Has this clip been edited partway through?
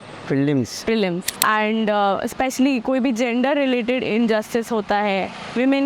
yes; 1 cut; at 1.3 s

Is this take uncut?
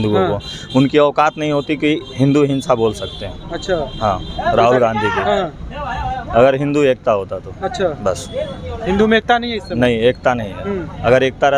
yes; 0 cuts

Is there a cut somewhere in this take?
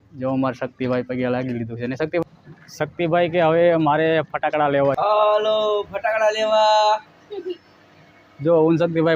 yes; 2 cuts; at 2.2 s, 5.0 s

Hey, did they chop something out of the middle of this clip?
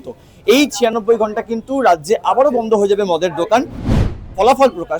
yes; 1 cut; at 3.8 s

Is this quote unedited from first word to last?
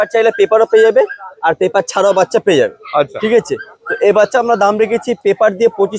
yes; 0 cuts

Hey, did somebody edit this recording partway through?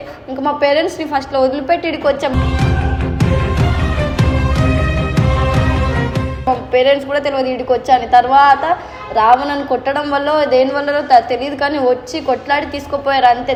no; 0 cuts

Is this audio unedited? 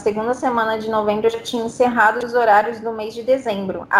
yes; 0 cuts

